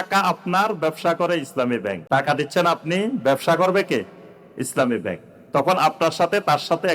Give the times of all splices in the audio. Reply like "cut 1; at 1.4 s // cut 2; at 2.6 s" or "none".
cut 1; at 2.0 s